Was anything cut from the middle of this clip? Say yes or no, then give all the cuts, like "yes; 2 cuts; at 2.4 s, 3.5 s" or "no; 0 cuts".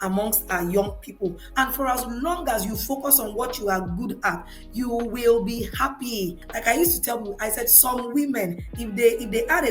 yes; 2 cuts; at 1.4 s, 6.4 s